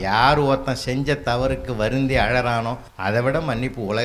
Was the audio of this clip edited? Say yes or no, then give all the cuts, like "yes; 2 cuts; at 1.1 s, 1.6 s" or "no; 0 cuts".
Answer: yes; 1 cut; at 2.9 s